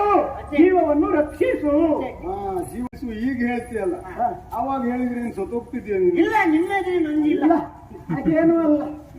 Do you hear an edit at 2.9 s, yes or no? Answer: yes